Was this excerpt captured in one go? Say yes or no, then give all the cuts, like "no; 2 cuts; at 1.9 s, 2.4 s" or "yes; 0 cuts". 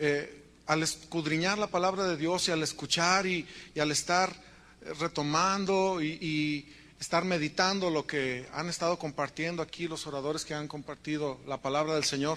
no; 1 cut; at 5.8 s